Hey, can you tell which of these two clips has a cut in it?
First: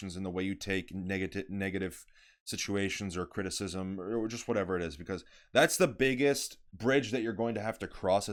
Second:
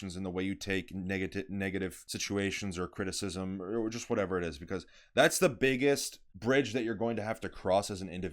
second; 1 cut; at 2.1 s

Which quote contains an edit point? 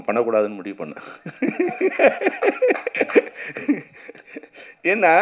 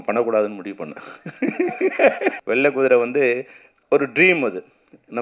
second; 1 cut; at 2.4 s

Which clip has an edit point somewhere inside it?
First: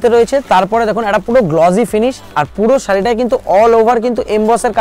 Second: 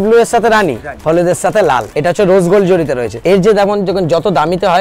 second; 3 cuts; at 0.9 s, 1.9 s, 3.1 s

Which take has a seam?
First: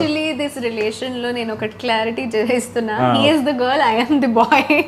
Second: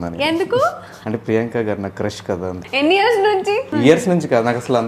second; 3 cuts; at 0.9 s, 2.6 s, 3.7 s

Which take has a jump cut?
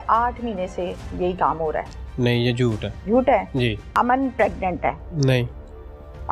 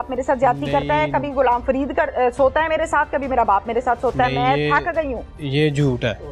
first; 3 cuts; at 2.9 s, 3.8 s, 5.1 s

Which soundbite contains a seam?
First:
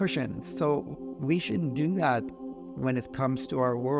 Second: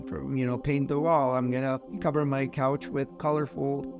second; 2 cuts; at 1.9 s, 3.1 s

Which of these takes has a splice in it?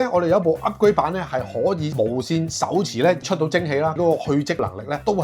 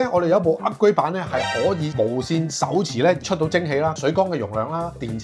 first; 1 cut; at 4.0 s

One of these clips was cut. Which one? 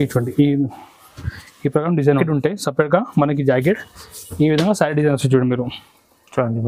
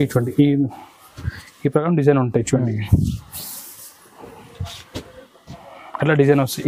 first; 1 cut; at 2.2 s

